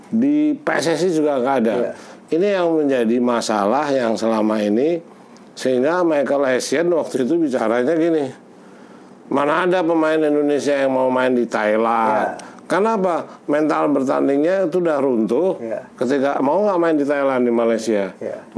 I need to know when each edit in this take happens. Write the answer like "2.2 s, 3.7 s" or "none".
none